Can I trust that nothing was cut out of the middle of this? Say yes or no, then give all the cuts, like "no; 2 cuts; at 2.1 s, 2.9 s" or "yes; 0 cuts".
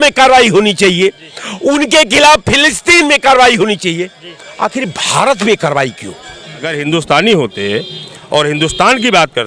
no; 1 cut; at 6.7 s